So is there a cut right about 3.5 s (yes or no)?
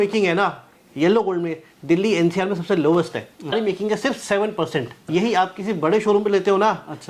yes